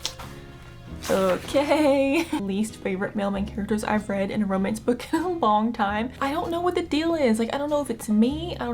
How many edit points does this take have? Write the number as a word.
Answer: two